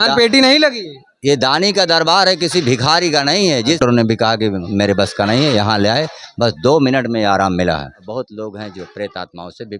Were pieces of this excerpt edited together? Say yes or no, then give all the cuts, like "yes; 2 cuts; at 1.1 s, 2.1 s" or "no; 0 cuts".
yes; 2 cuts; at 3.8 s, 8.0 s